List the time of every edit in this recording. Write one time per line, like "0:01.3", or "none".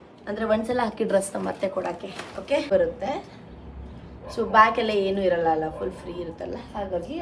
0:02.7